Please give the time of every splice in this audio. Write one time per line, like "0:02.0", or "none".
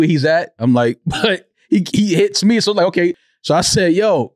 0:03.3